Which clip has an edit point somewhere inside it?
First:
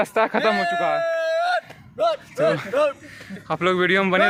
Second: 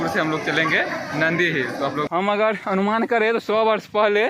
second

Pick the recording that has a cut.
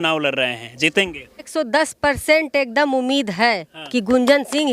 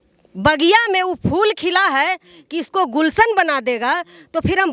first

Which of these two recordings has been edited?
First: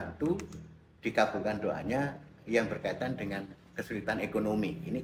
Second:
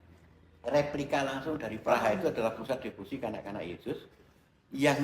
second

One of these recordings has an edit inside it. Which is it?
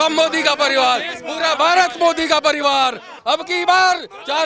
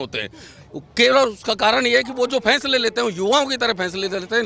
first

